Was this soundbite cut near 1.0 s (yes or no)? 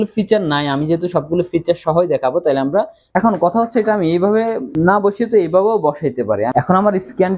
no